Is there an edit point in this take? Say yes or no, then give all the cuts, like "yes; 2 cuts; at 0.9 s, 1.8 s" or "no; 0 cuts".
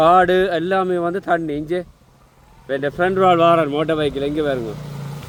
no; 0 cuts